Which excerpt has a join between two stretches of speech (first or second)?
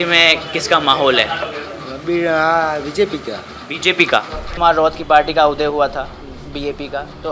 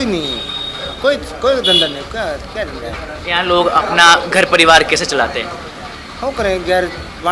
first